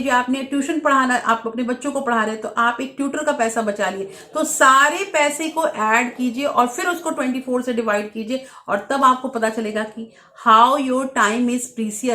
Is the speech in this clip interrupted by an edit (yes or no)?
no